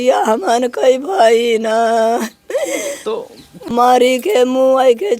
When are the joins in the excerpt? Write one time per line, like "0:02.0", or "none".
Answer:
0:03.5